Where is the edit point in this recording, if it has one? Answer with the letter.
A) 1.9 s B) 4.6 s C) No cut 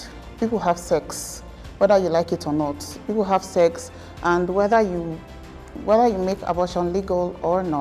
C